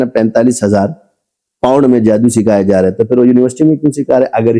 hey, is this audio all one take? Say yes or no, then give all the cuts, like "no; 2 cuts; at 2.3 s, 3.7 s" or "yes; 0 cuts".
yes; 0 cuts